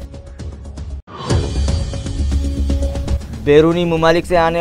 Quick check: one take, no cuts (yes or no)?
no